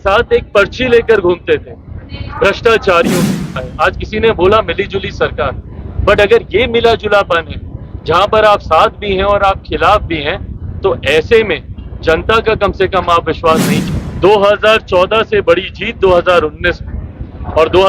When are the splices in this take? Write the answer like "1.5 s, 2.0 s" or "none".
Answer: 3.6 s, 13.8 s